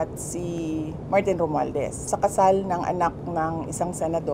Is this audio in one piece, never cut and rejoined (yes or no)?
no